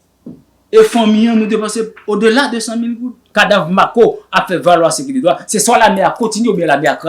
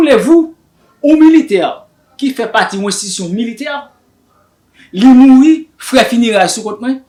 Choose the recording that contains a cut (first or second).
first